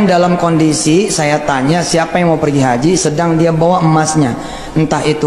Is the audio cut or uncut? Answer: uncut